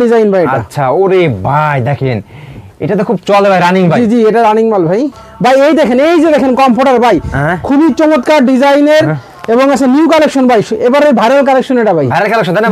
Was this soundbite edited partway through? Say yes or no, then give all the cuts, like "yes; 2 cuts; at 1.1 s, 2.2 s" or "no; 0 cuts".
no; 0 cuts